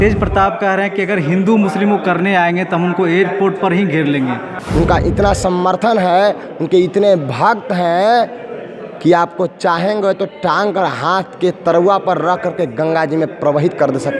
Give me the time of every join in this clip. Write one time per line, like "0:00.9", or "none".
0:04.5